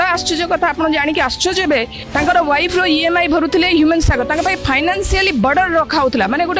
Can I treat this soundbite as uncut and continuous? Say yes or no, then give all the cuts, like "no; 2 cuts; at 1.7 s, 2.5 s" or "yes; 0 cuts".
yes; 0 cuts